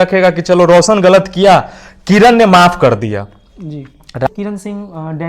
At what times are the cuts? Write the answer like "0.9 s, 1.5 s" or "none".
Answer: 4.3 s